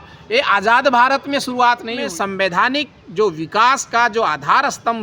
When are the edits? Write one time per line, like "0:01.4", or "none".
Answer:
0:02.0